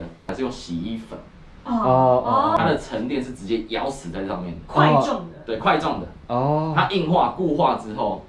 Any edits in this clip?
yes; 1 cut; at 2.6 s

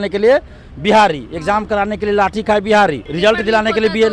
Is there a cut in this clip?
yes; 1 cut; at 3.0 s

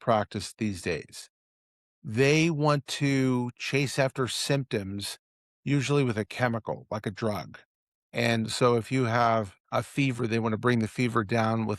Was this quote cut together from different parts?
yes; 1 cut; at 9.6 s

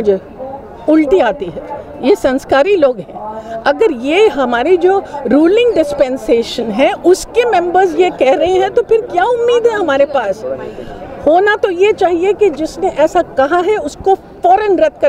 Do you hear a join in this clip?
no; 0 cuts

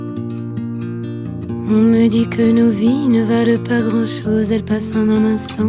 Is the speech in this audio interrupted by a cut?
no; 0 cuts

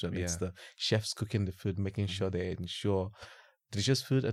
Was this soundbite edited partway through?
no; 0 cuts

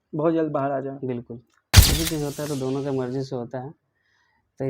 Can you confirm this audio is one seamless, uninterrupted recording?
no; 1 cut; at 1.9 s

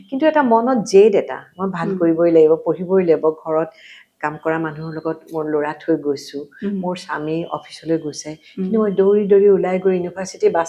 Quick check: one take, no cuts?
yes; 0 cuts

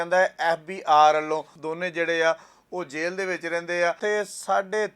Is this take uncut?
no; 2 cuts; at 1.6 s, 4.0 s

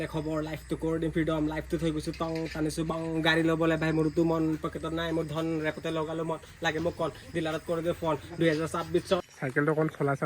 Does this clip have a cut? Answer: yes; 1 cut; at 9.2 s

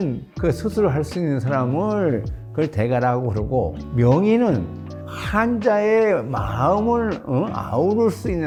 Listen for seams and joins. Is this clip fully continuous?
yes; 0 cuts

